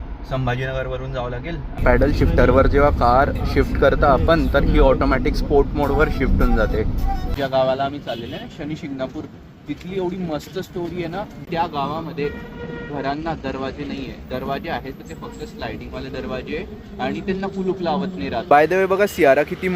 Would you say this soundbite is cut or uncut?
cut